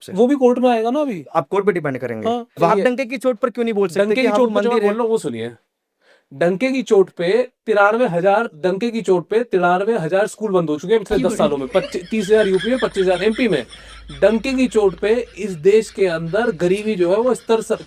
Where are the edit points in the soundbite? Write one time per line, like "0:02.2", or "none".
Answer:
0:02.7